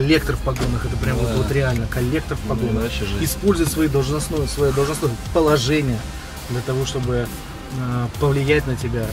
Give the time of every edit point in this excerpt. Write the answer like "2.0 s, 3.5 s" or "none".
none